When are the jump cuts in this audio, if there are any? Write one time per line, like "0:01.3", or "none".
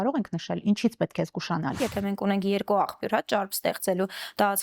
0:01.8